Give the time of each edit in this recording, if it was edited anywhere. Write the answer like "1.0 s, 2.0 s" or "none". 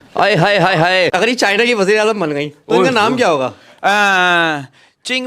1.1 s